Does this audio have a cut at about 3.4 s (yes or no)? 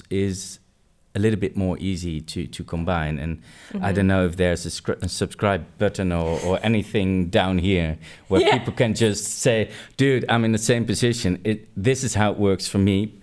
no